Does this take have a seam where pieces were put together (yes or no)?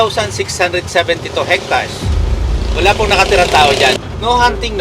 no